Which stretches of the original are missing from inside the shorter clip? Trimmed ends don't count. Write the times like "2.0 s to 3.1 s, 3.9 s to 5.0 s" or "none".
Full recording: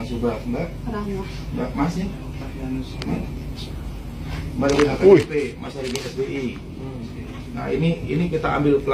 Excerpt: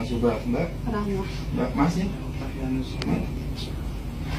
none